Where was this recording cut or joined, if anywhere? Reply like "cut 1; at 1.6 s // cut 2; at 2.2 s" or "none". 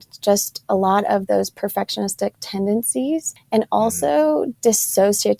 cut 1; at 3.4 s